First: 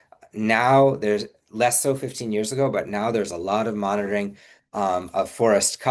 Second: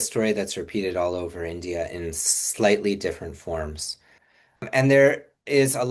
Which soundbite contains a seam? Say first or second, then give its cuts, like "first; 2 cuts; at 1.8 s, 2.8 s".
second; 1 cut; at 4.6 s